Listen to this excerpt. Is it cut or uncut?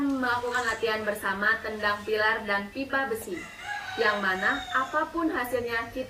uncut